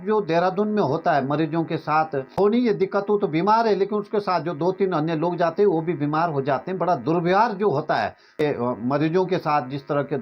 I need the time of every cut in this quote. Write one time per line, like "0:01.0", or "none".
0:02.4
0:08.4